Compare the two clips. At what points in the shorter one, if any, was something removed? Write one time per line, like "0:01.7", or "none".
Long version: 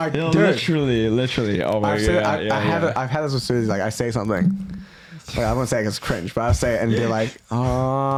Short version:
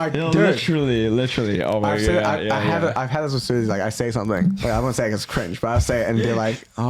0:04.6

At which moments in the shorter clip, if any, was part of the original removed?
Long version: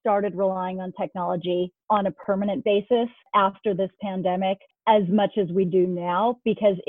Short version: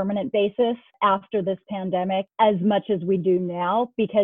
0:02.3

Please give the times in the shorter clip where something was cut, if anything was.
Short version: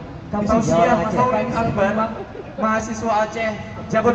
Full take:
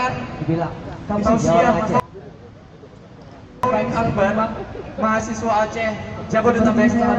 0:01.2

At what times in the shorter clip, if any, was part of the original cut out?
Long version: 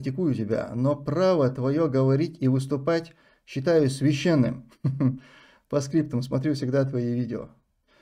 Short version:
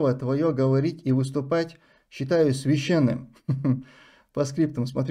none

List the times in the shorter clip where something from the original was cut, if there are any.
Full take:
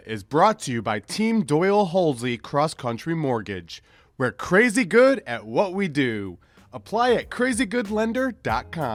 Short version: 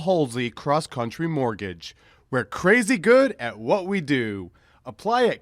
none

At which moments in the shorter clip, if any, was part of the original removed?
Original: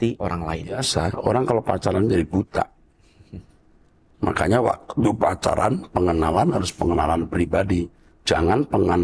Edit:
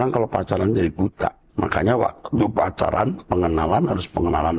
0:01.4

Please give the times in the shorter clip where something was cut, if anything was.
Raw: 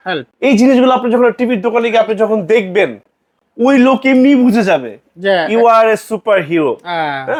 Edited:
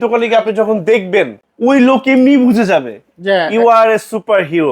0:01.4

